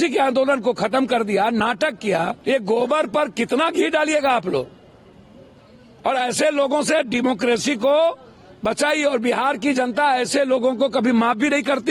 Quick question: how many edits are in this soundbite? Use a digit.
1